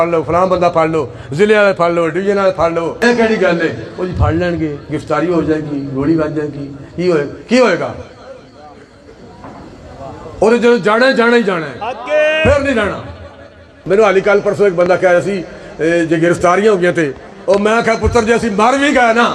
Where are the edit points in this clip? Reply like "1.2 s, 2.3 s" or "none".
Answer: 3.0 s, 13.7 s